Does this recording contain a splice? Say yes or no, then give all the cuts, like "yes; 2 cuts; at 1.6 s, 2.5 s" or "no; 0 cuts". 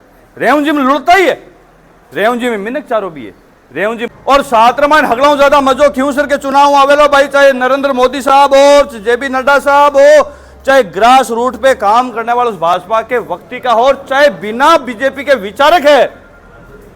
yes; 1 cut; at 4.0 s